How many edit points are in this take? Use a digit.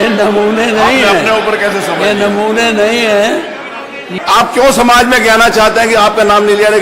1